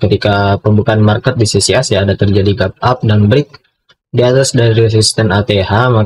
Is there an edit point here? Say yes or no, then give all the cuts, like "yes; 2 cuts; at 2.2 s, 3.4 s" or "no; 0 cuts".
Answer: no; 0 cuts